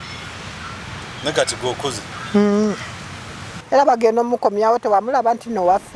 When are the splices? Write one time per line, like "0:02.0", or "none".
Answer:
0:03.6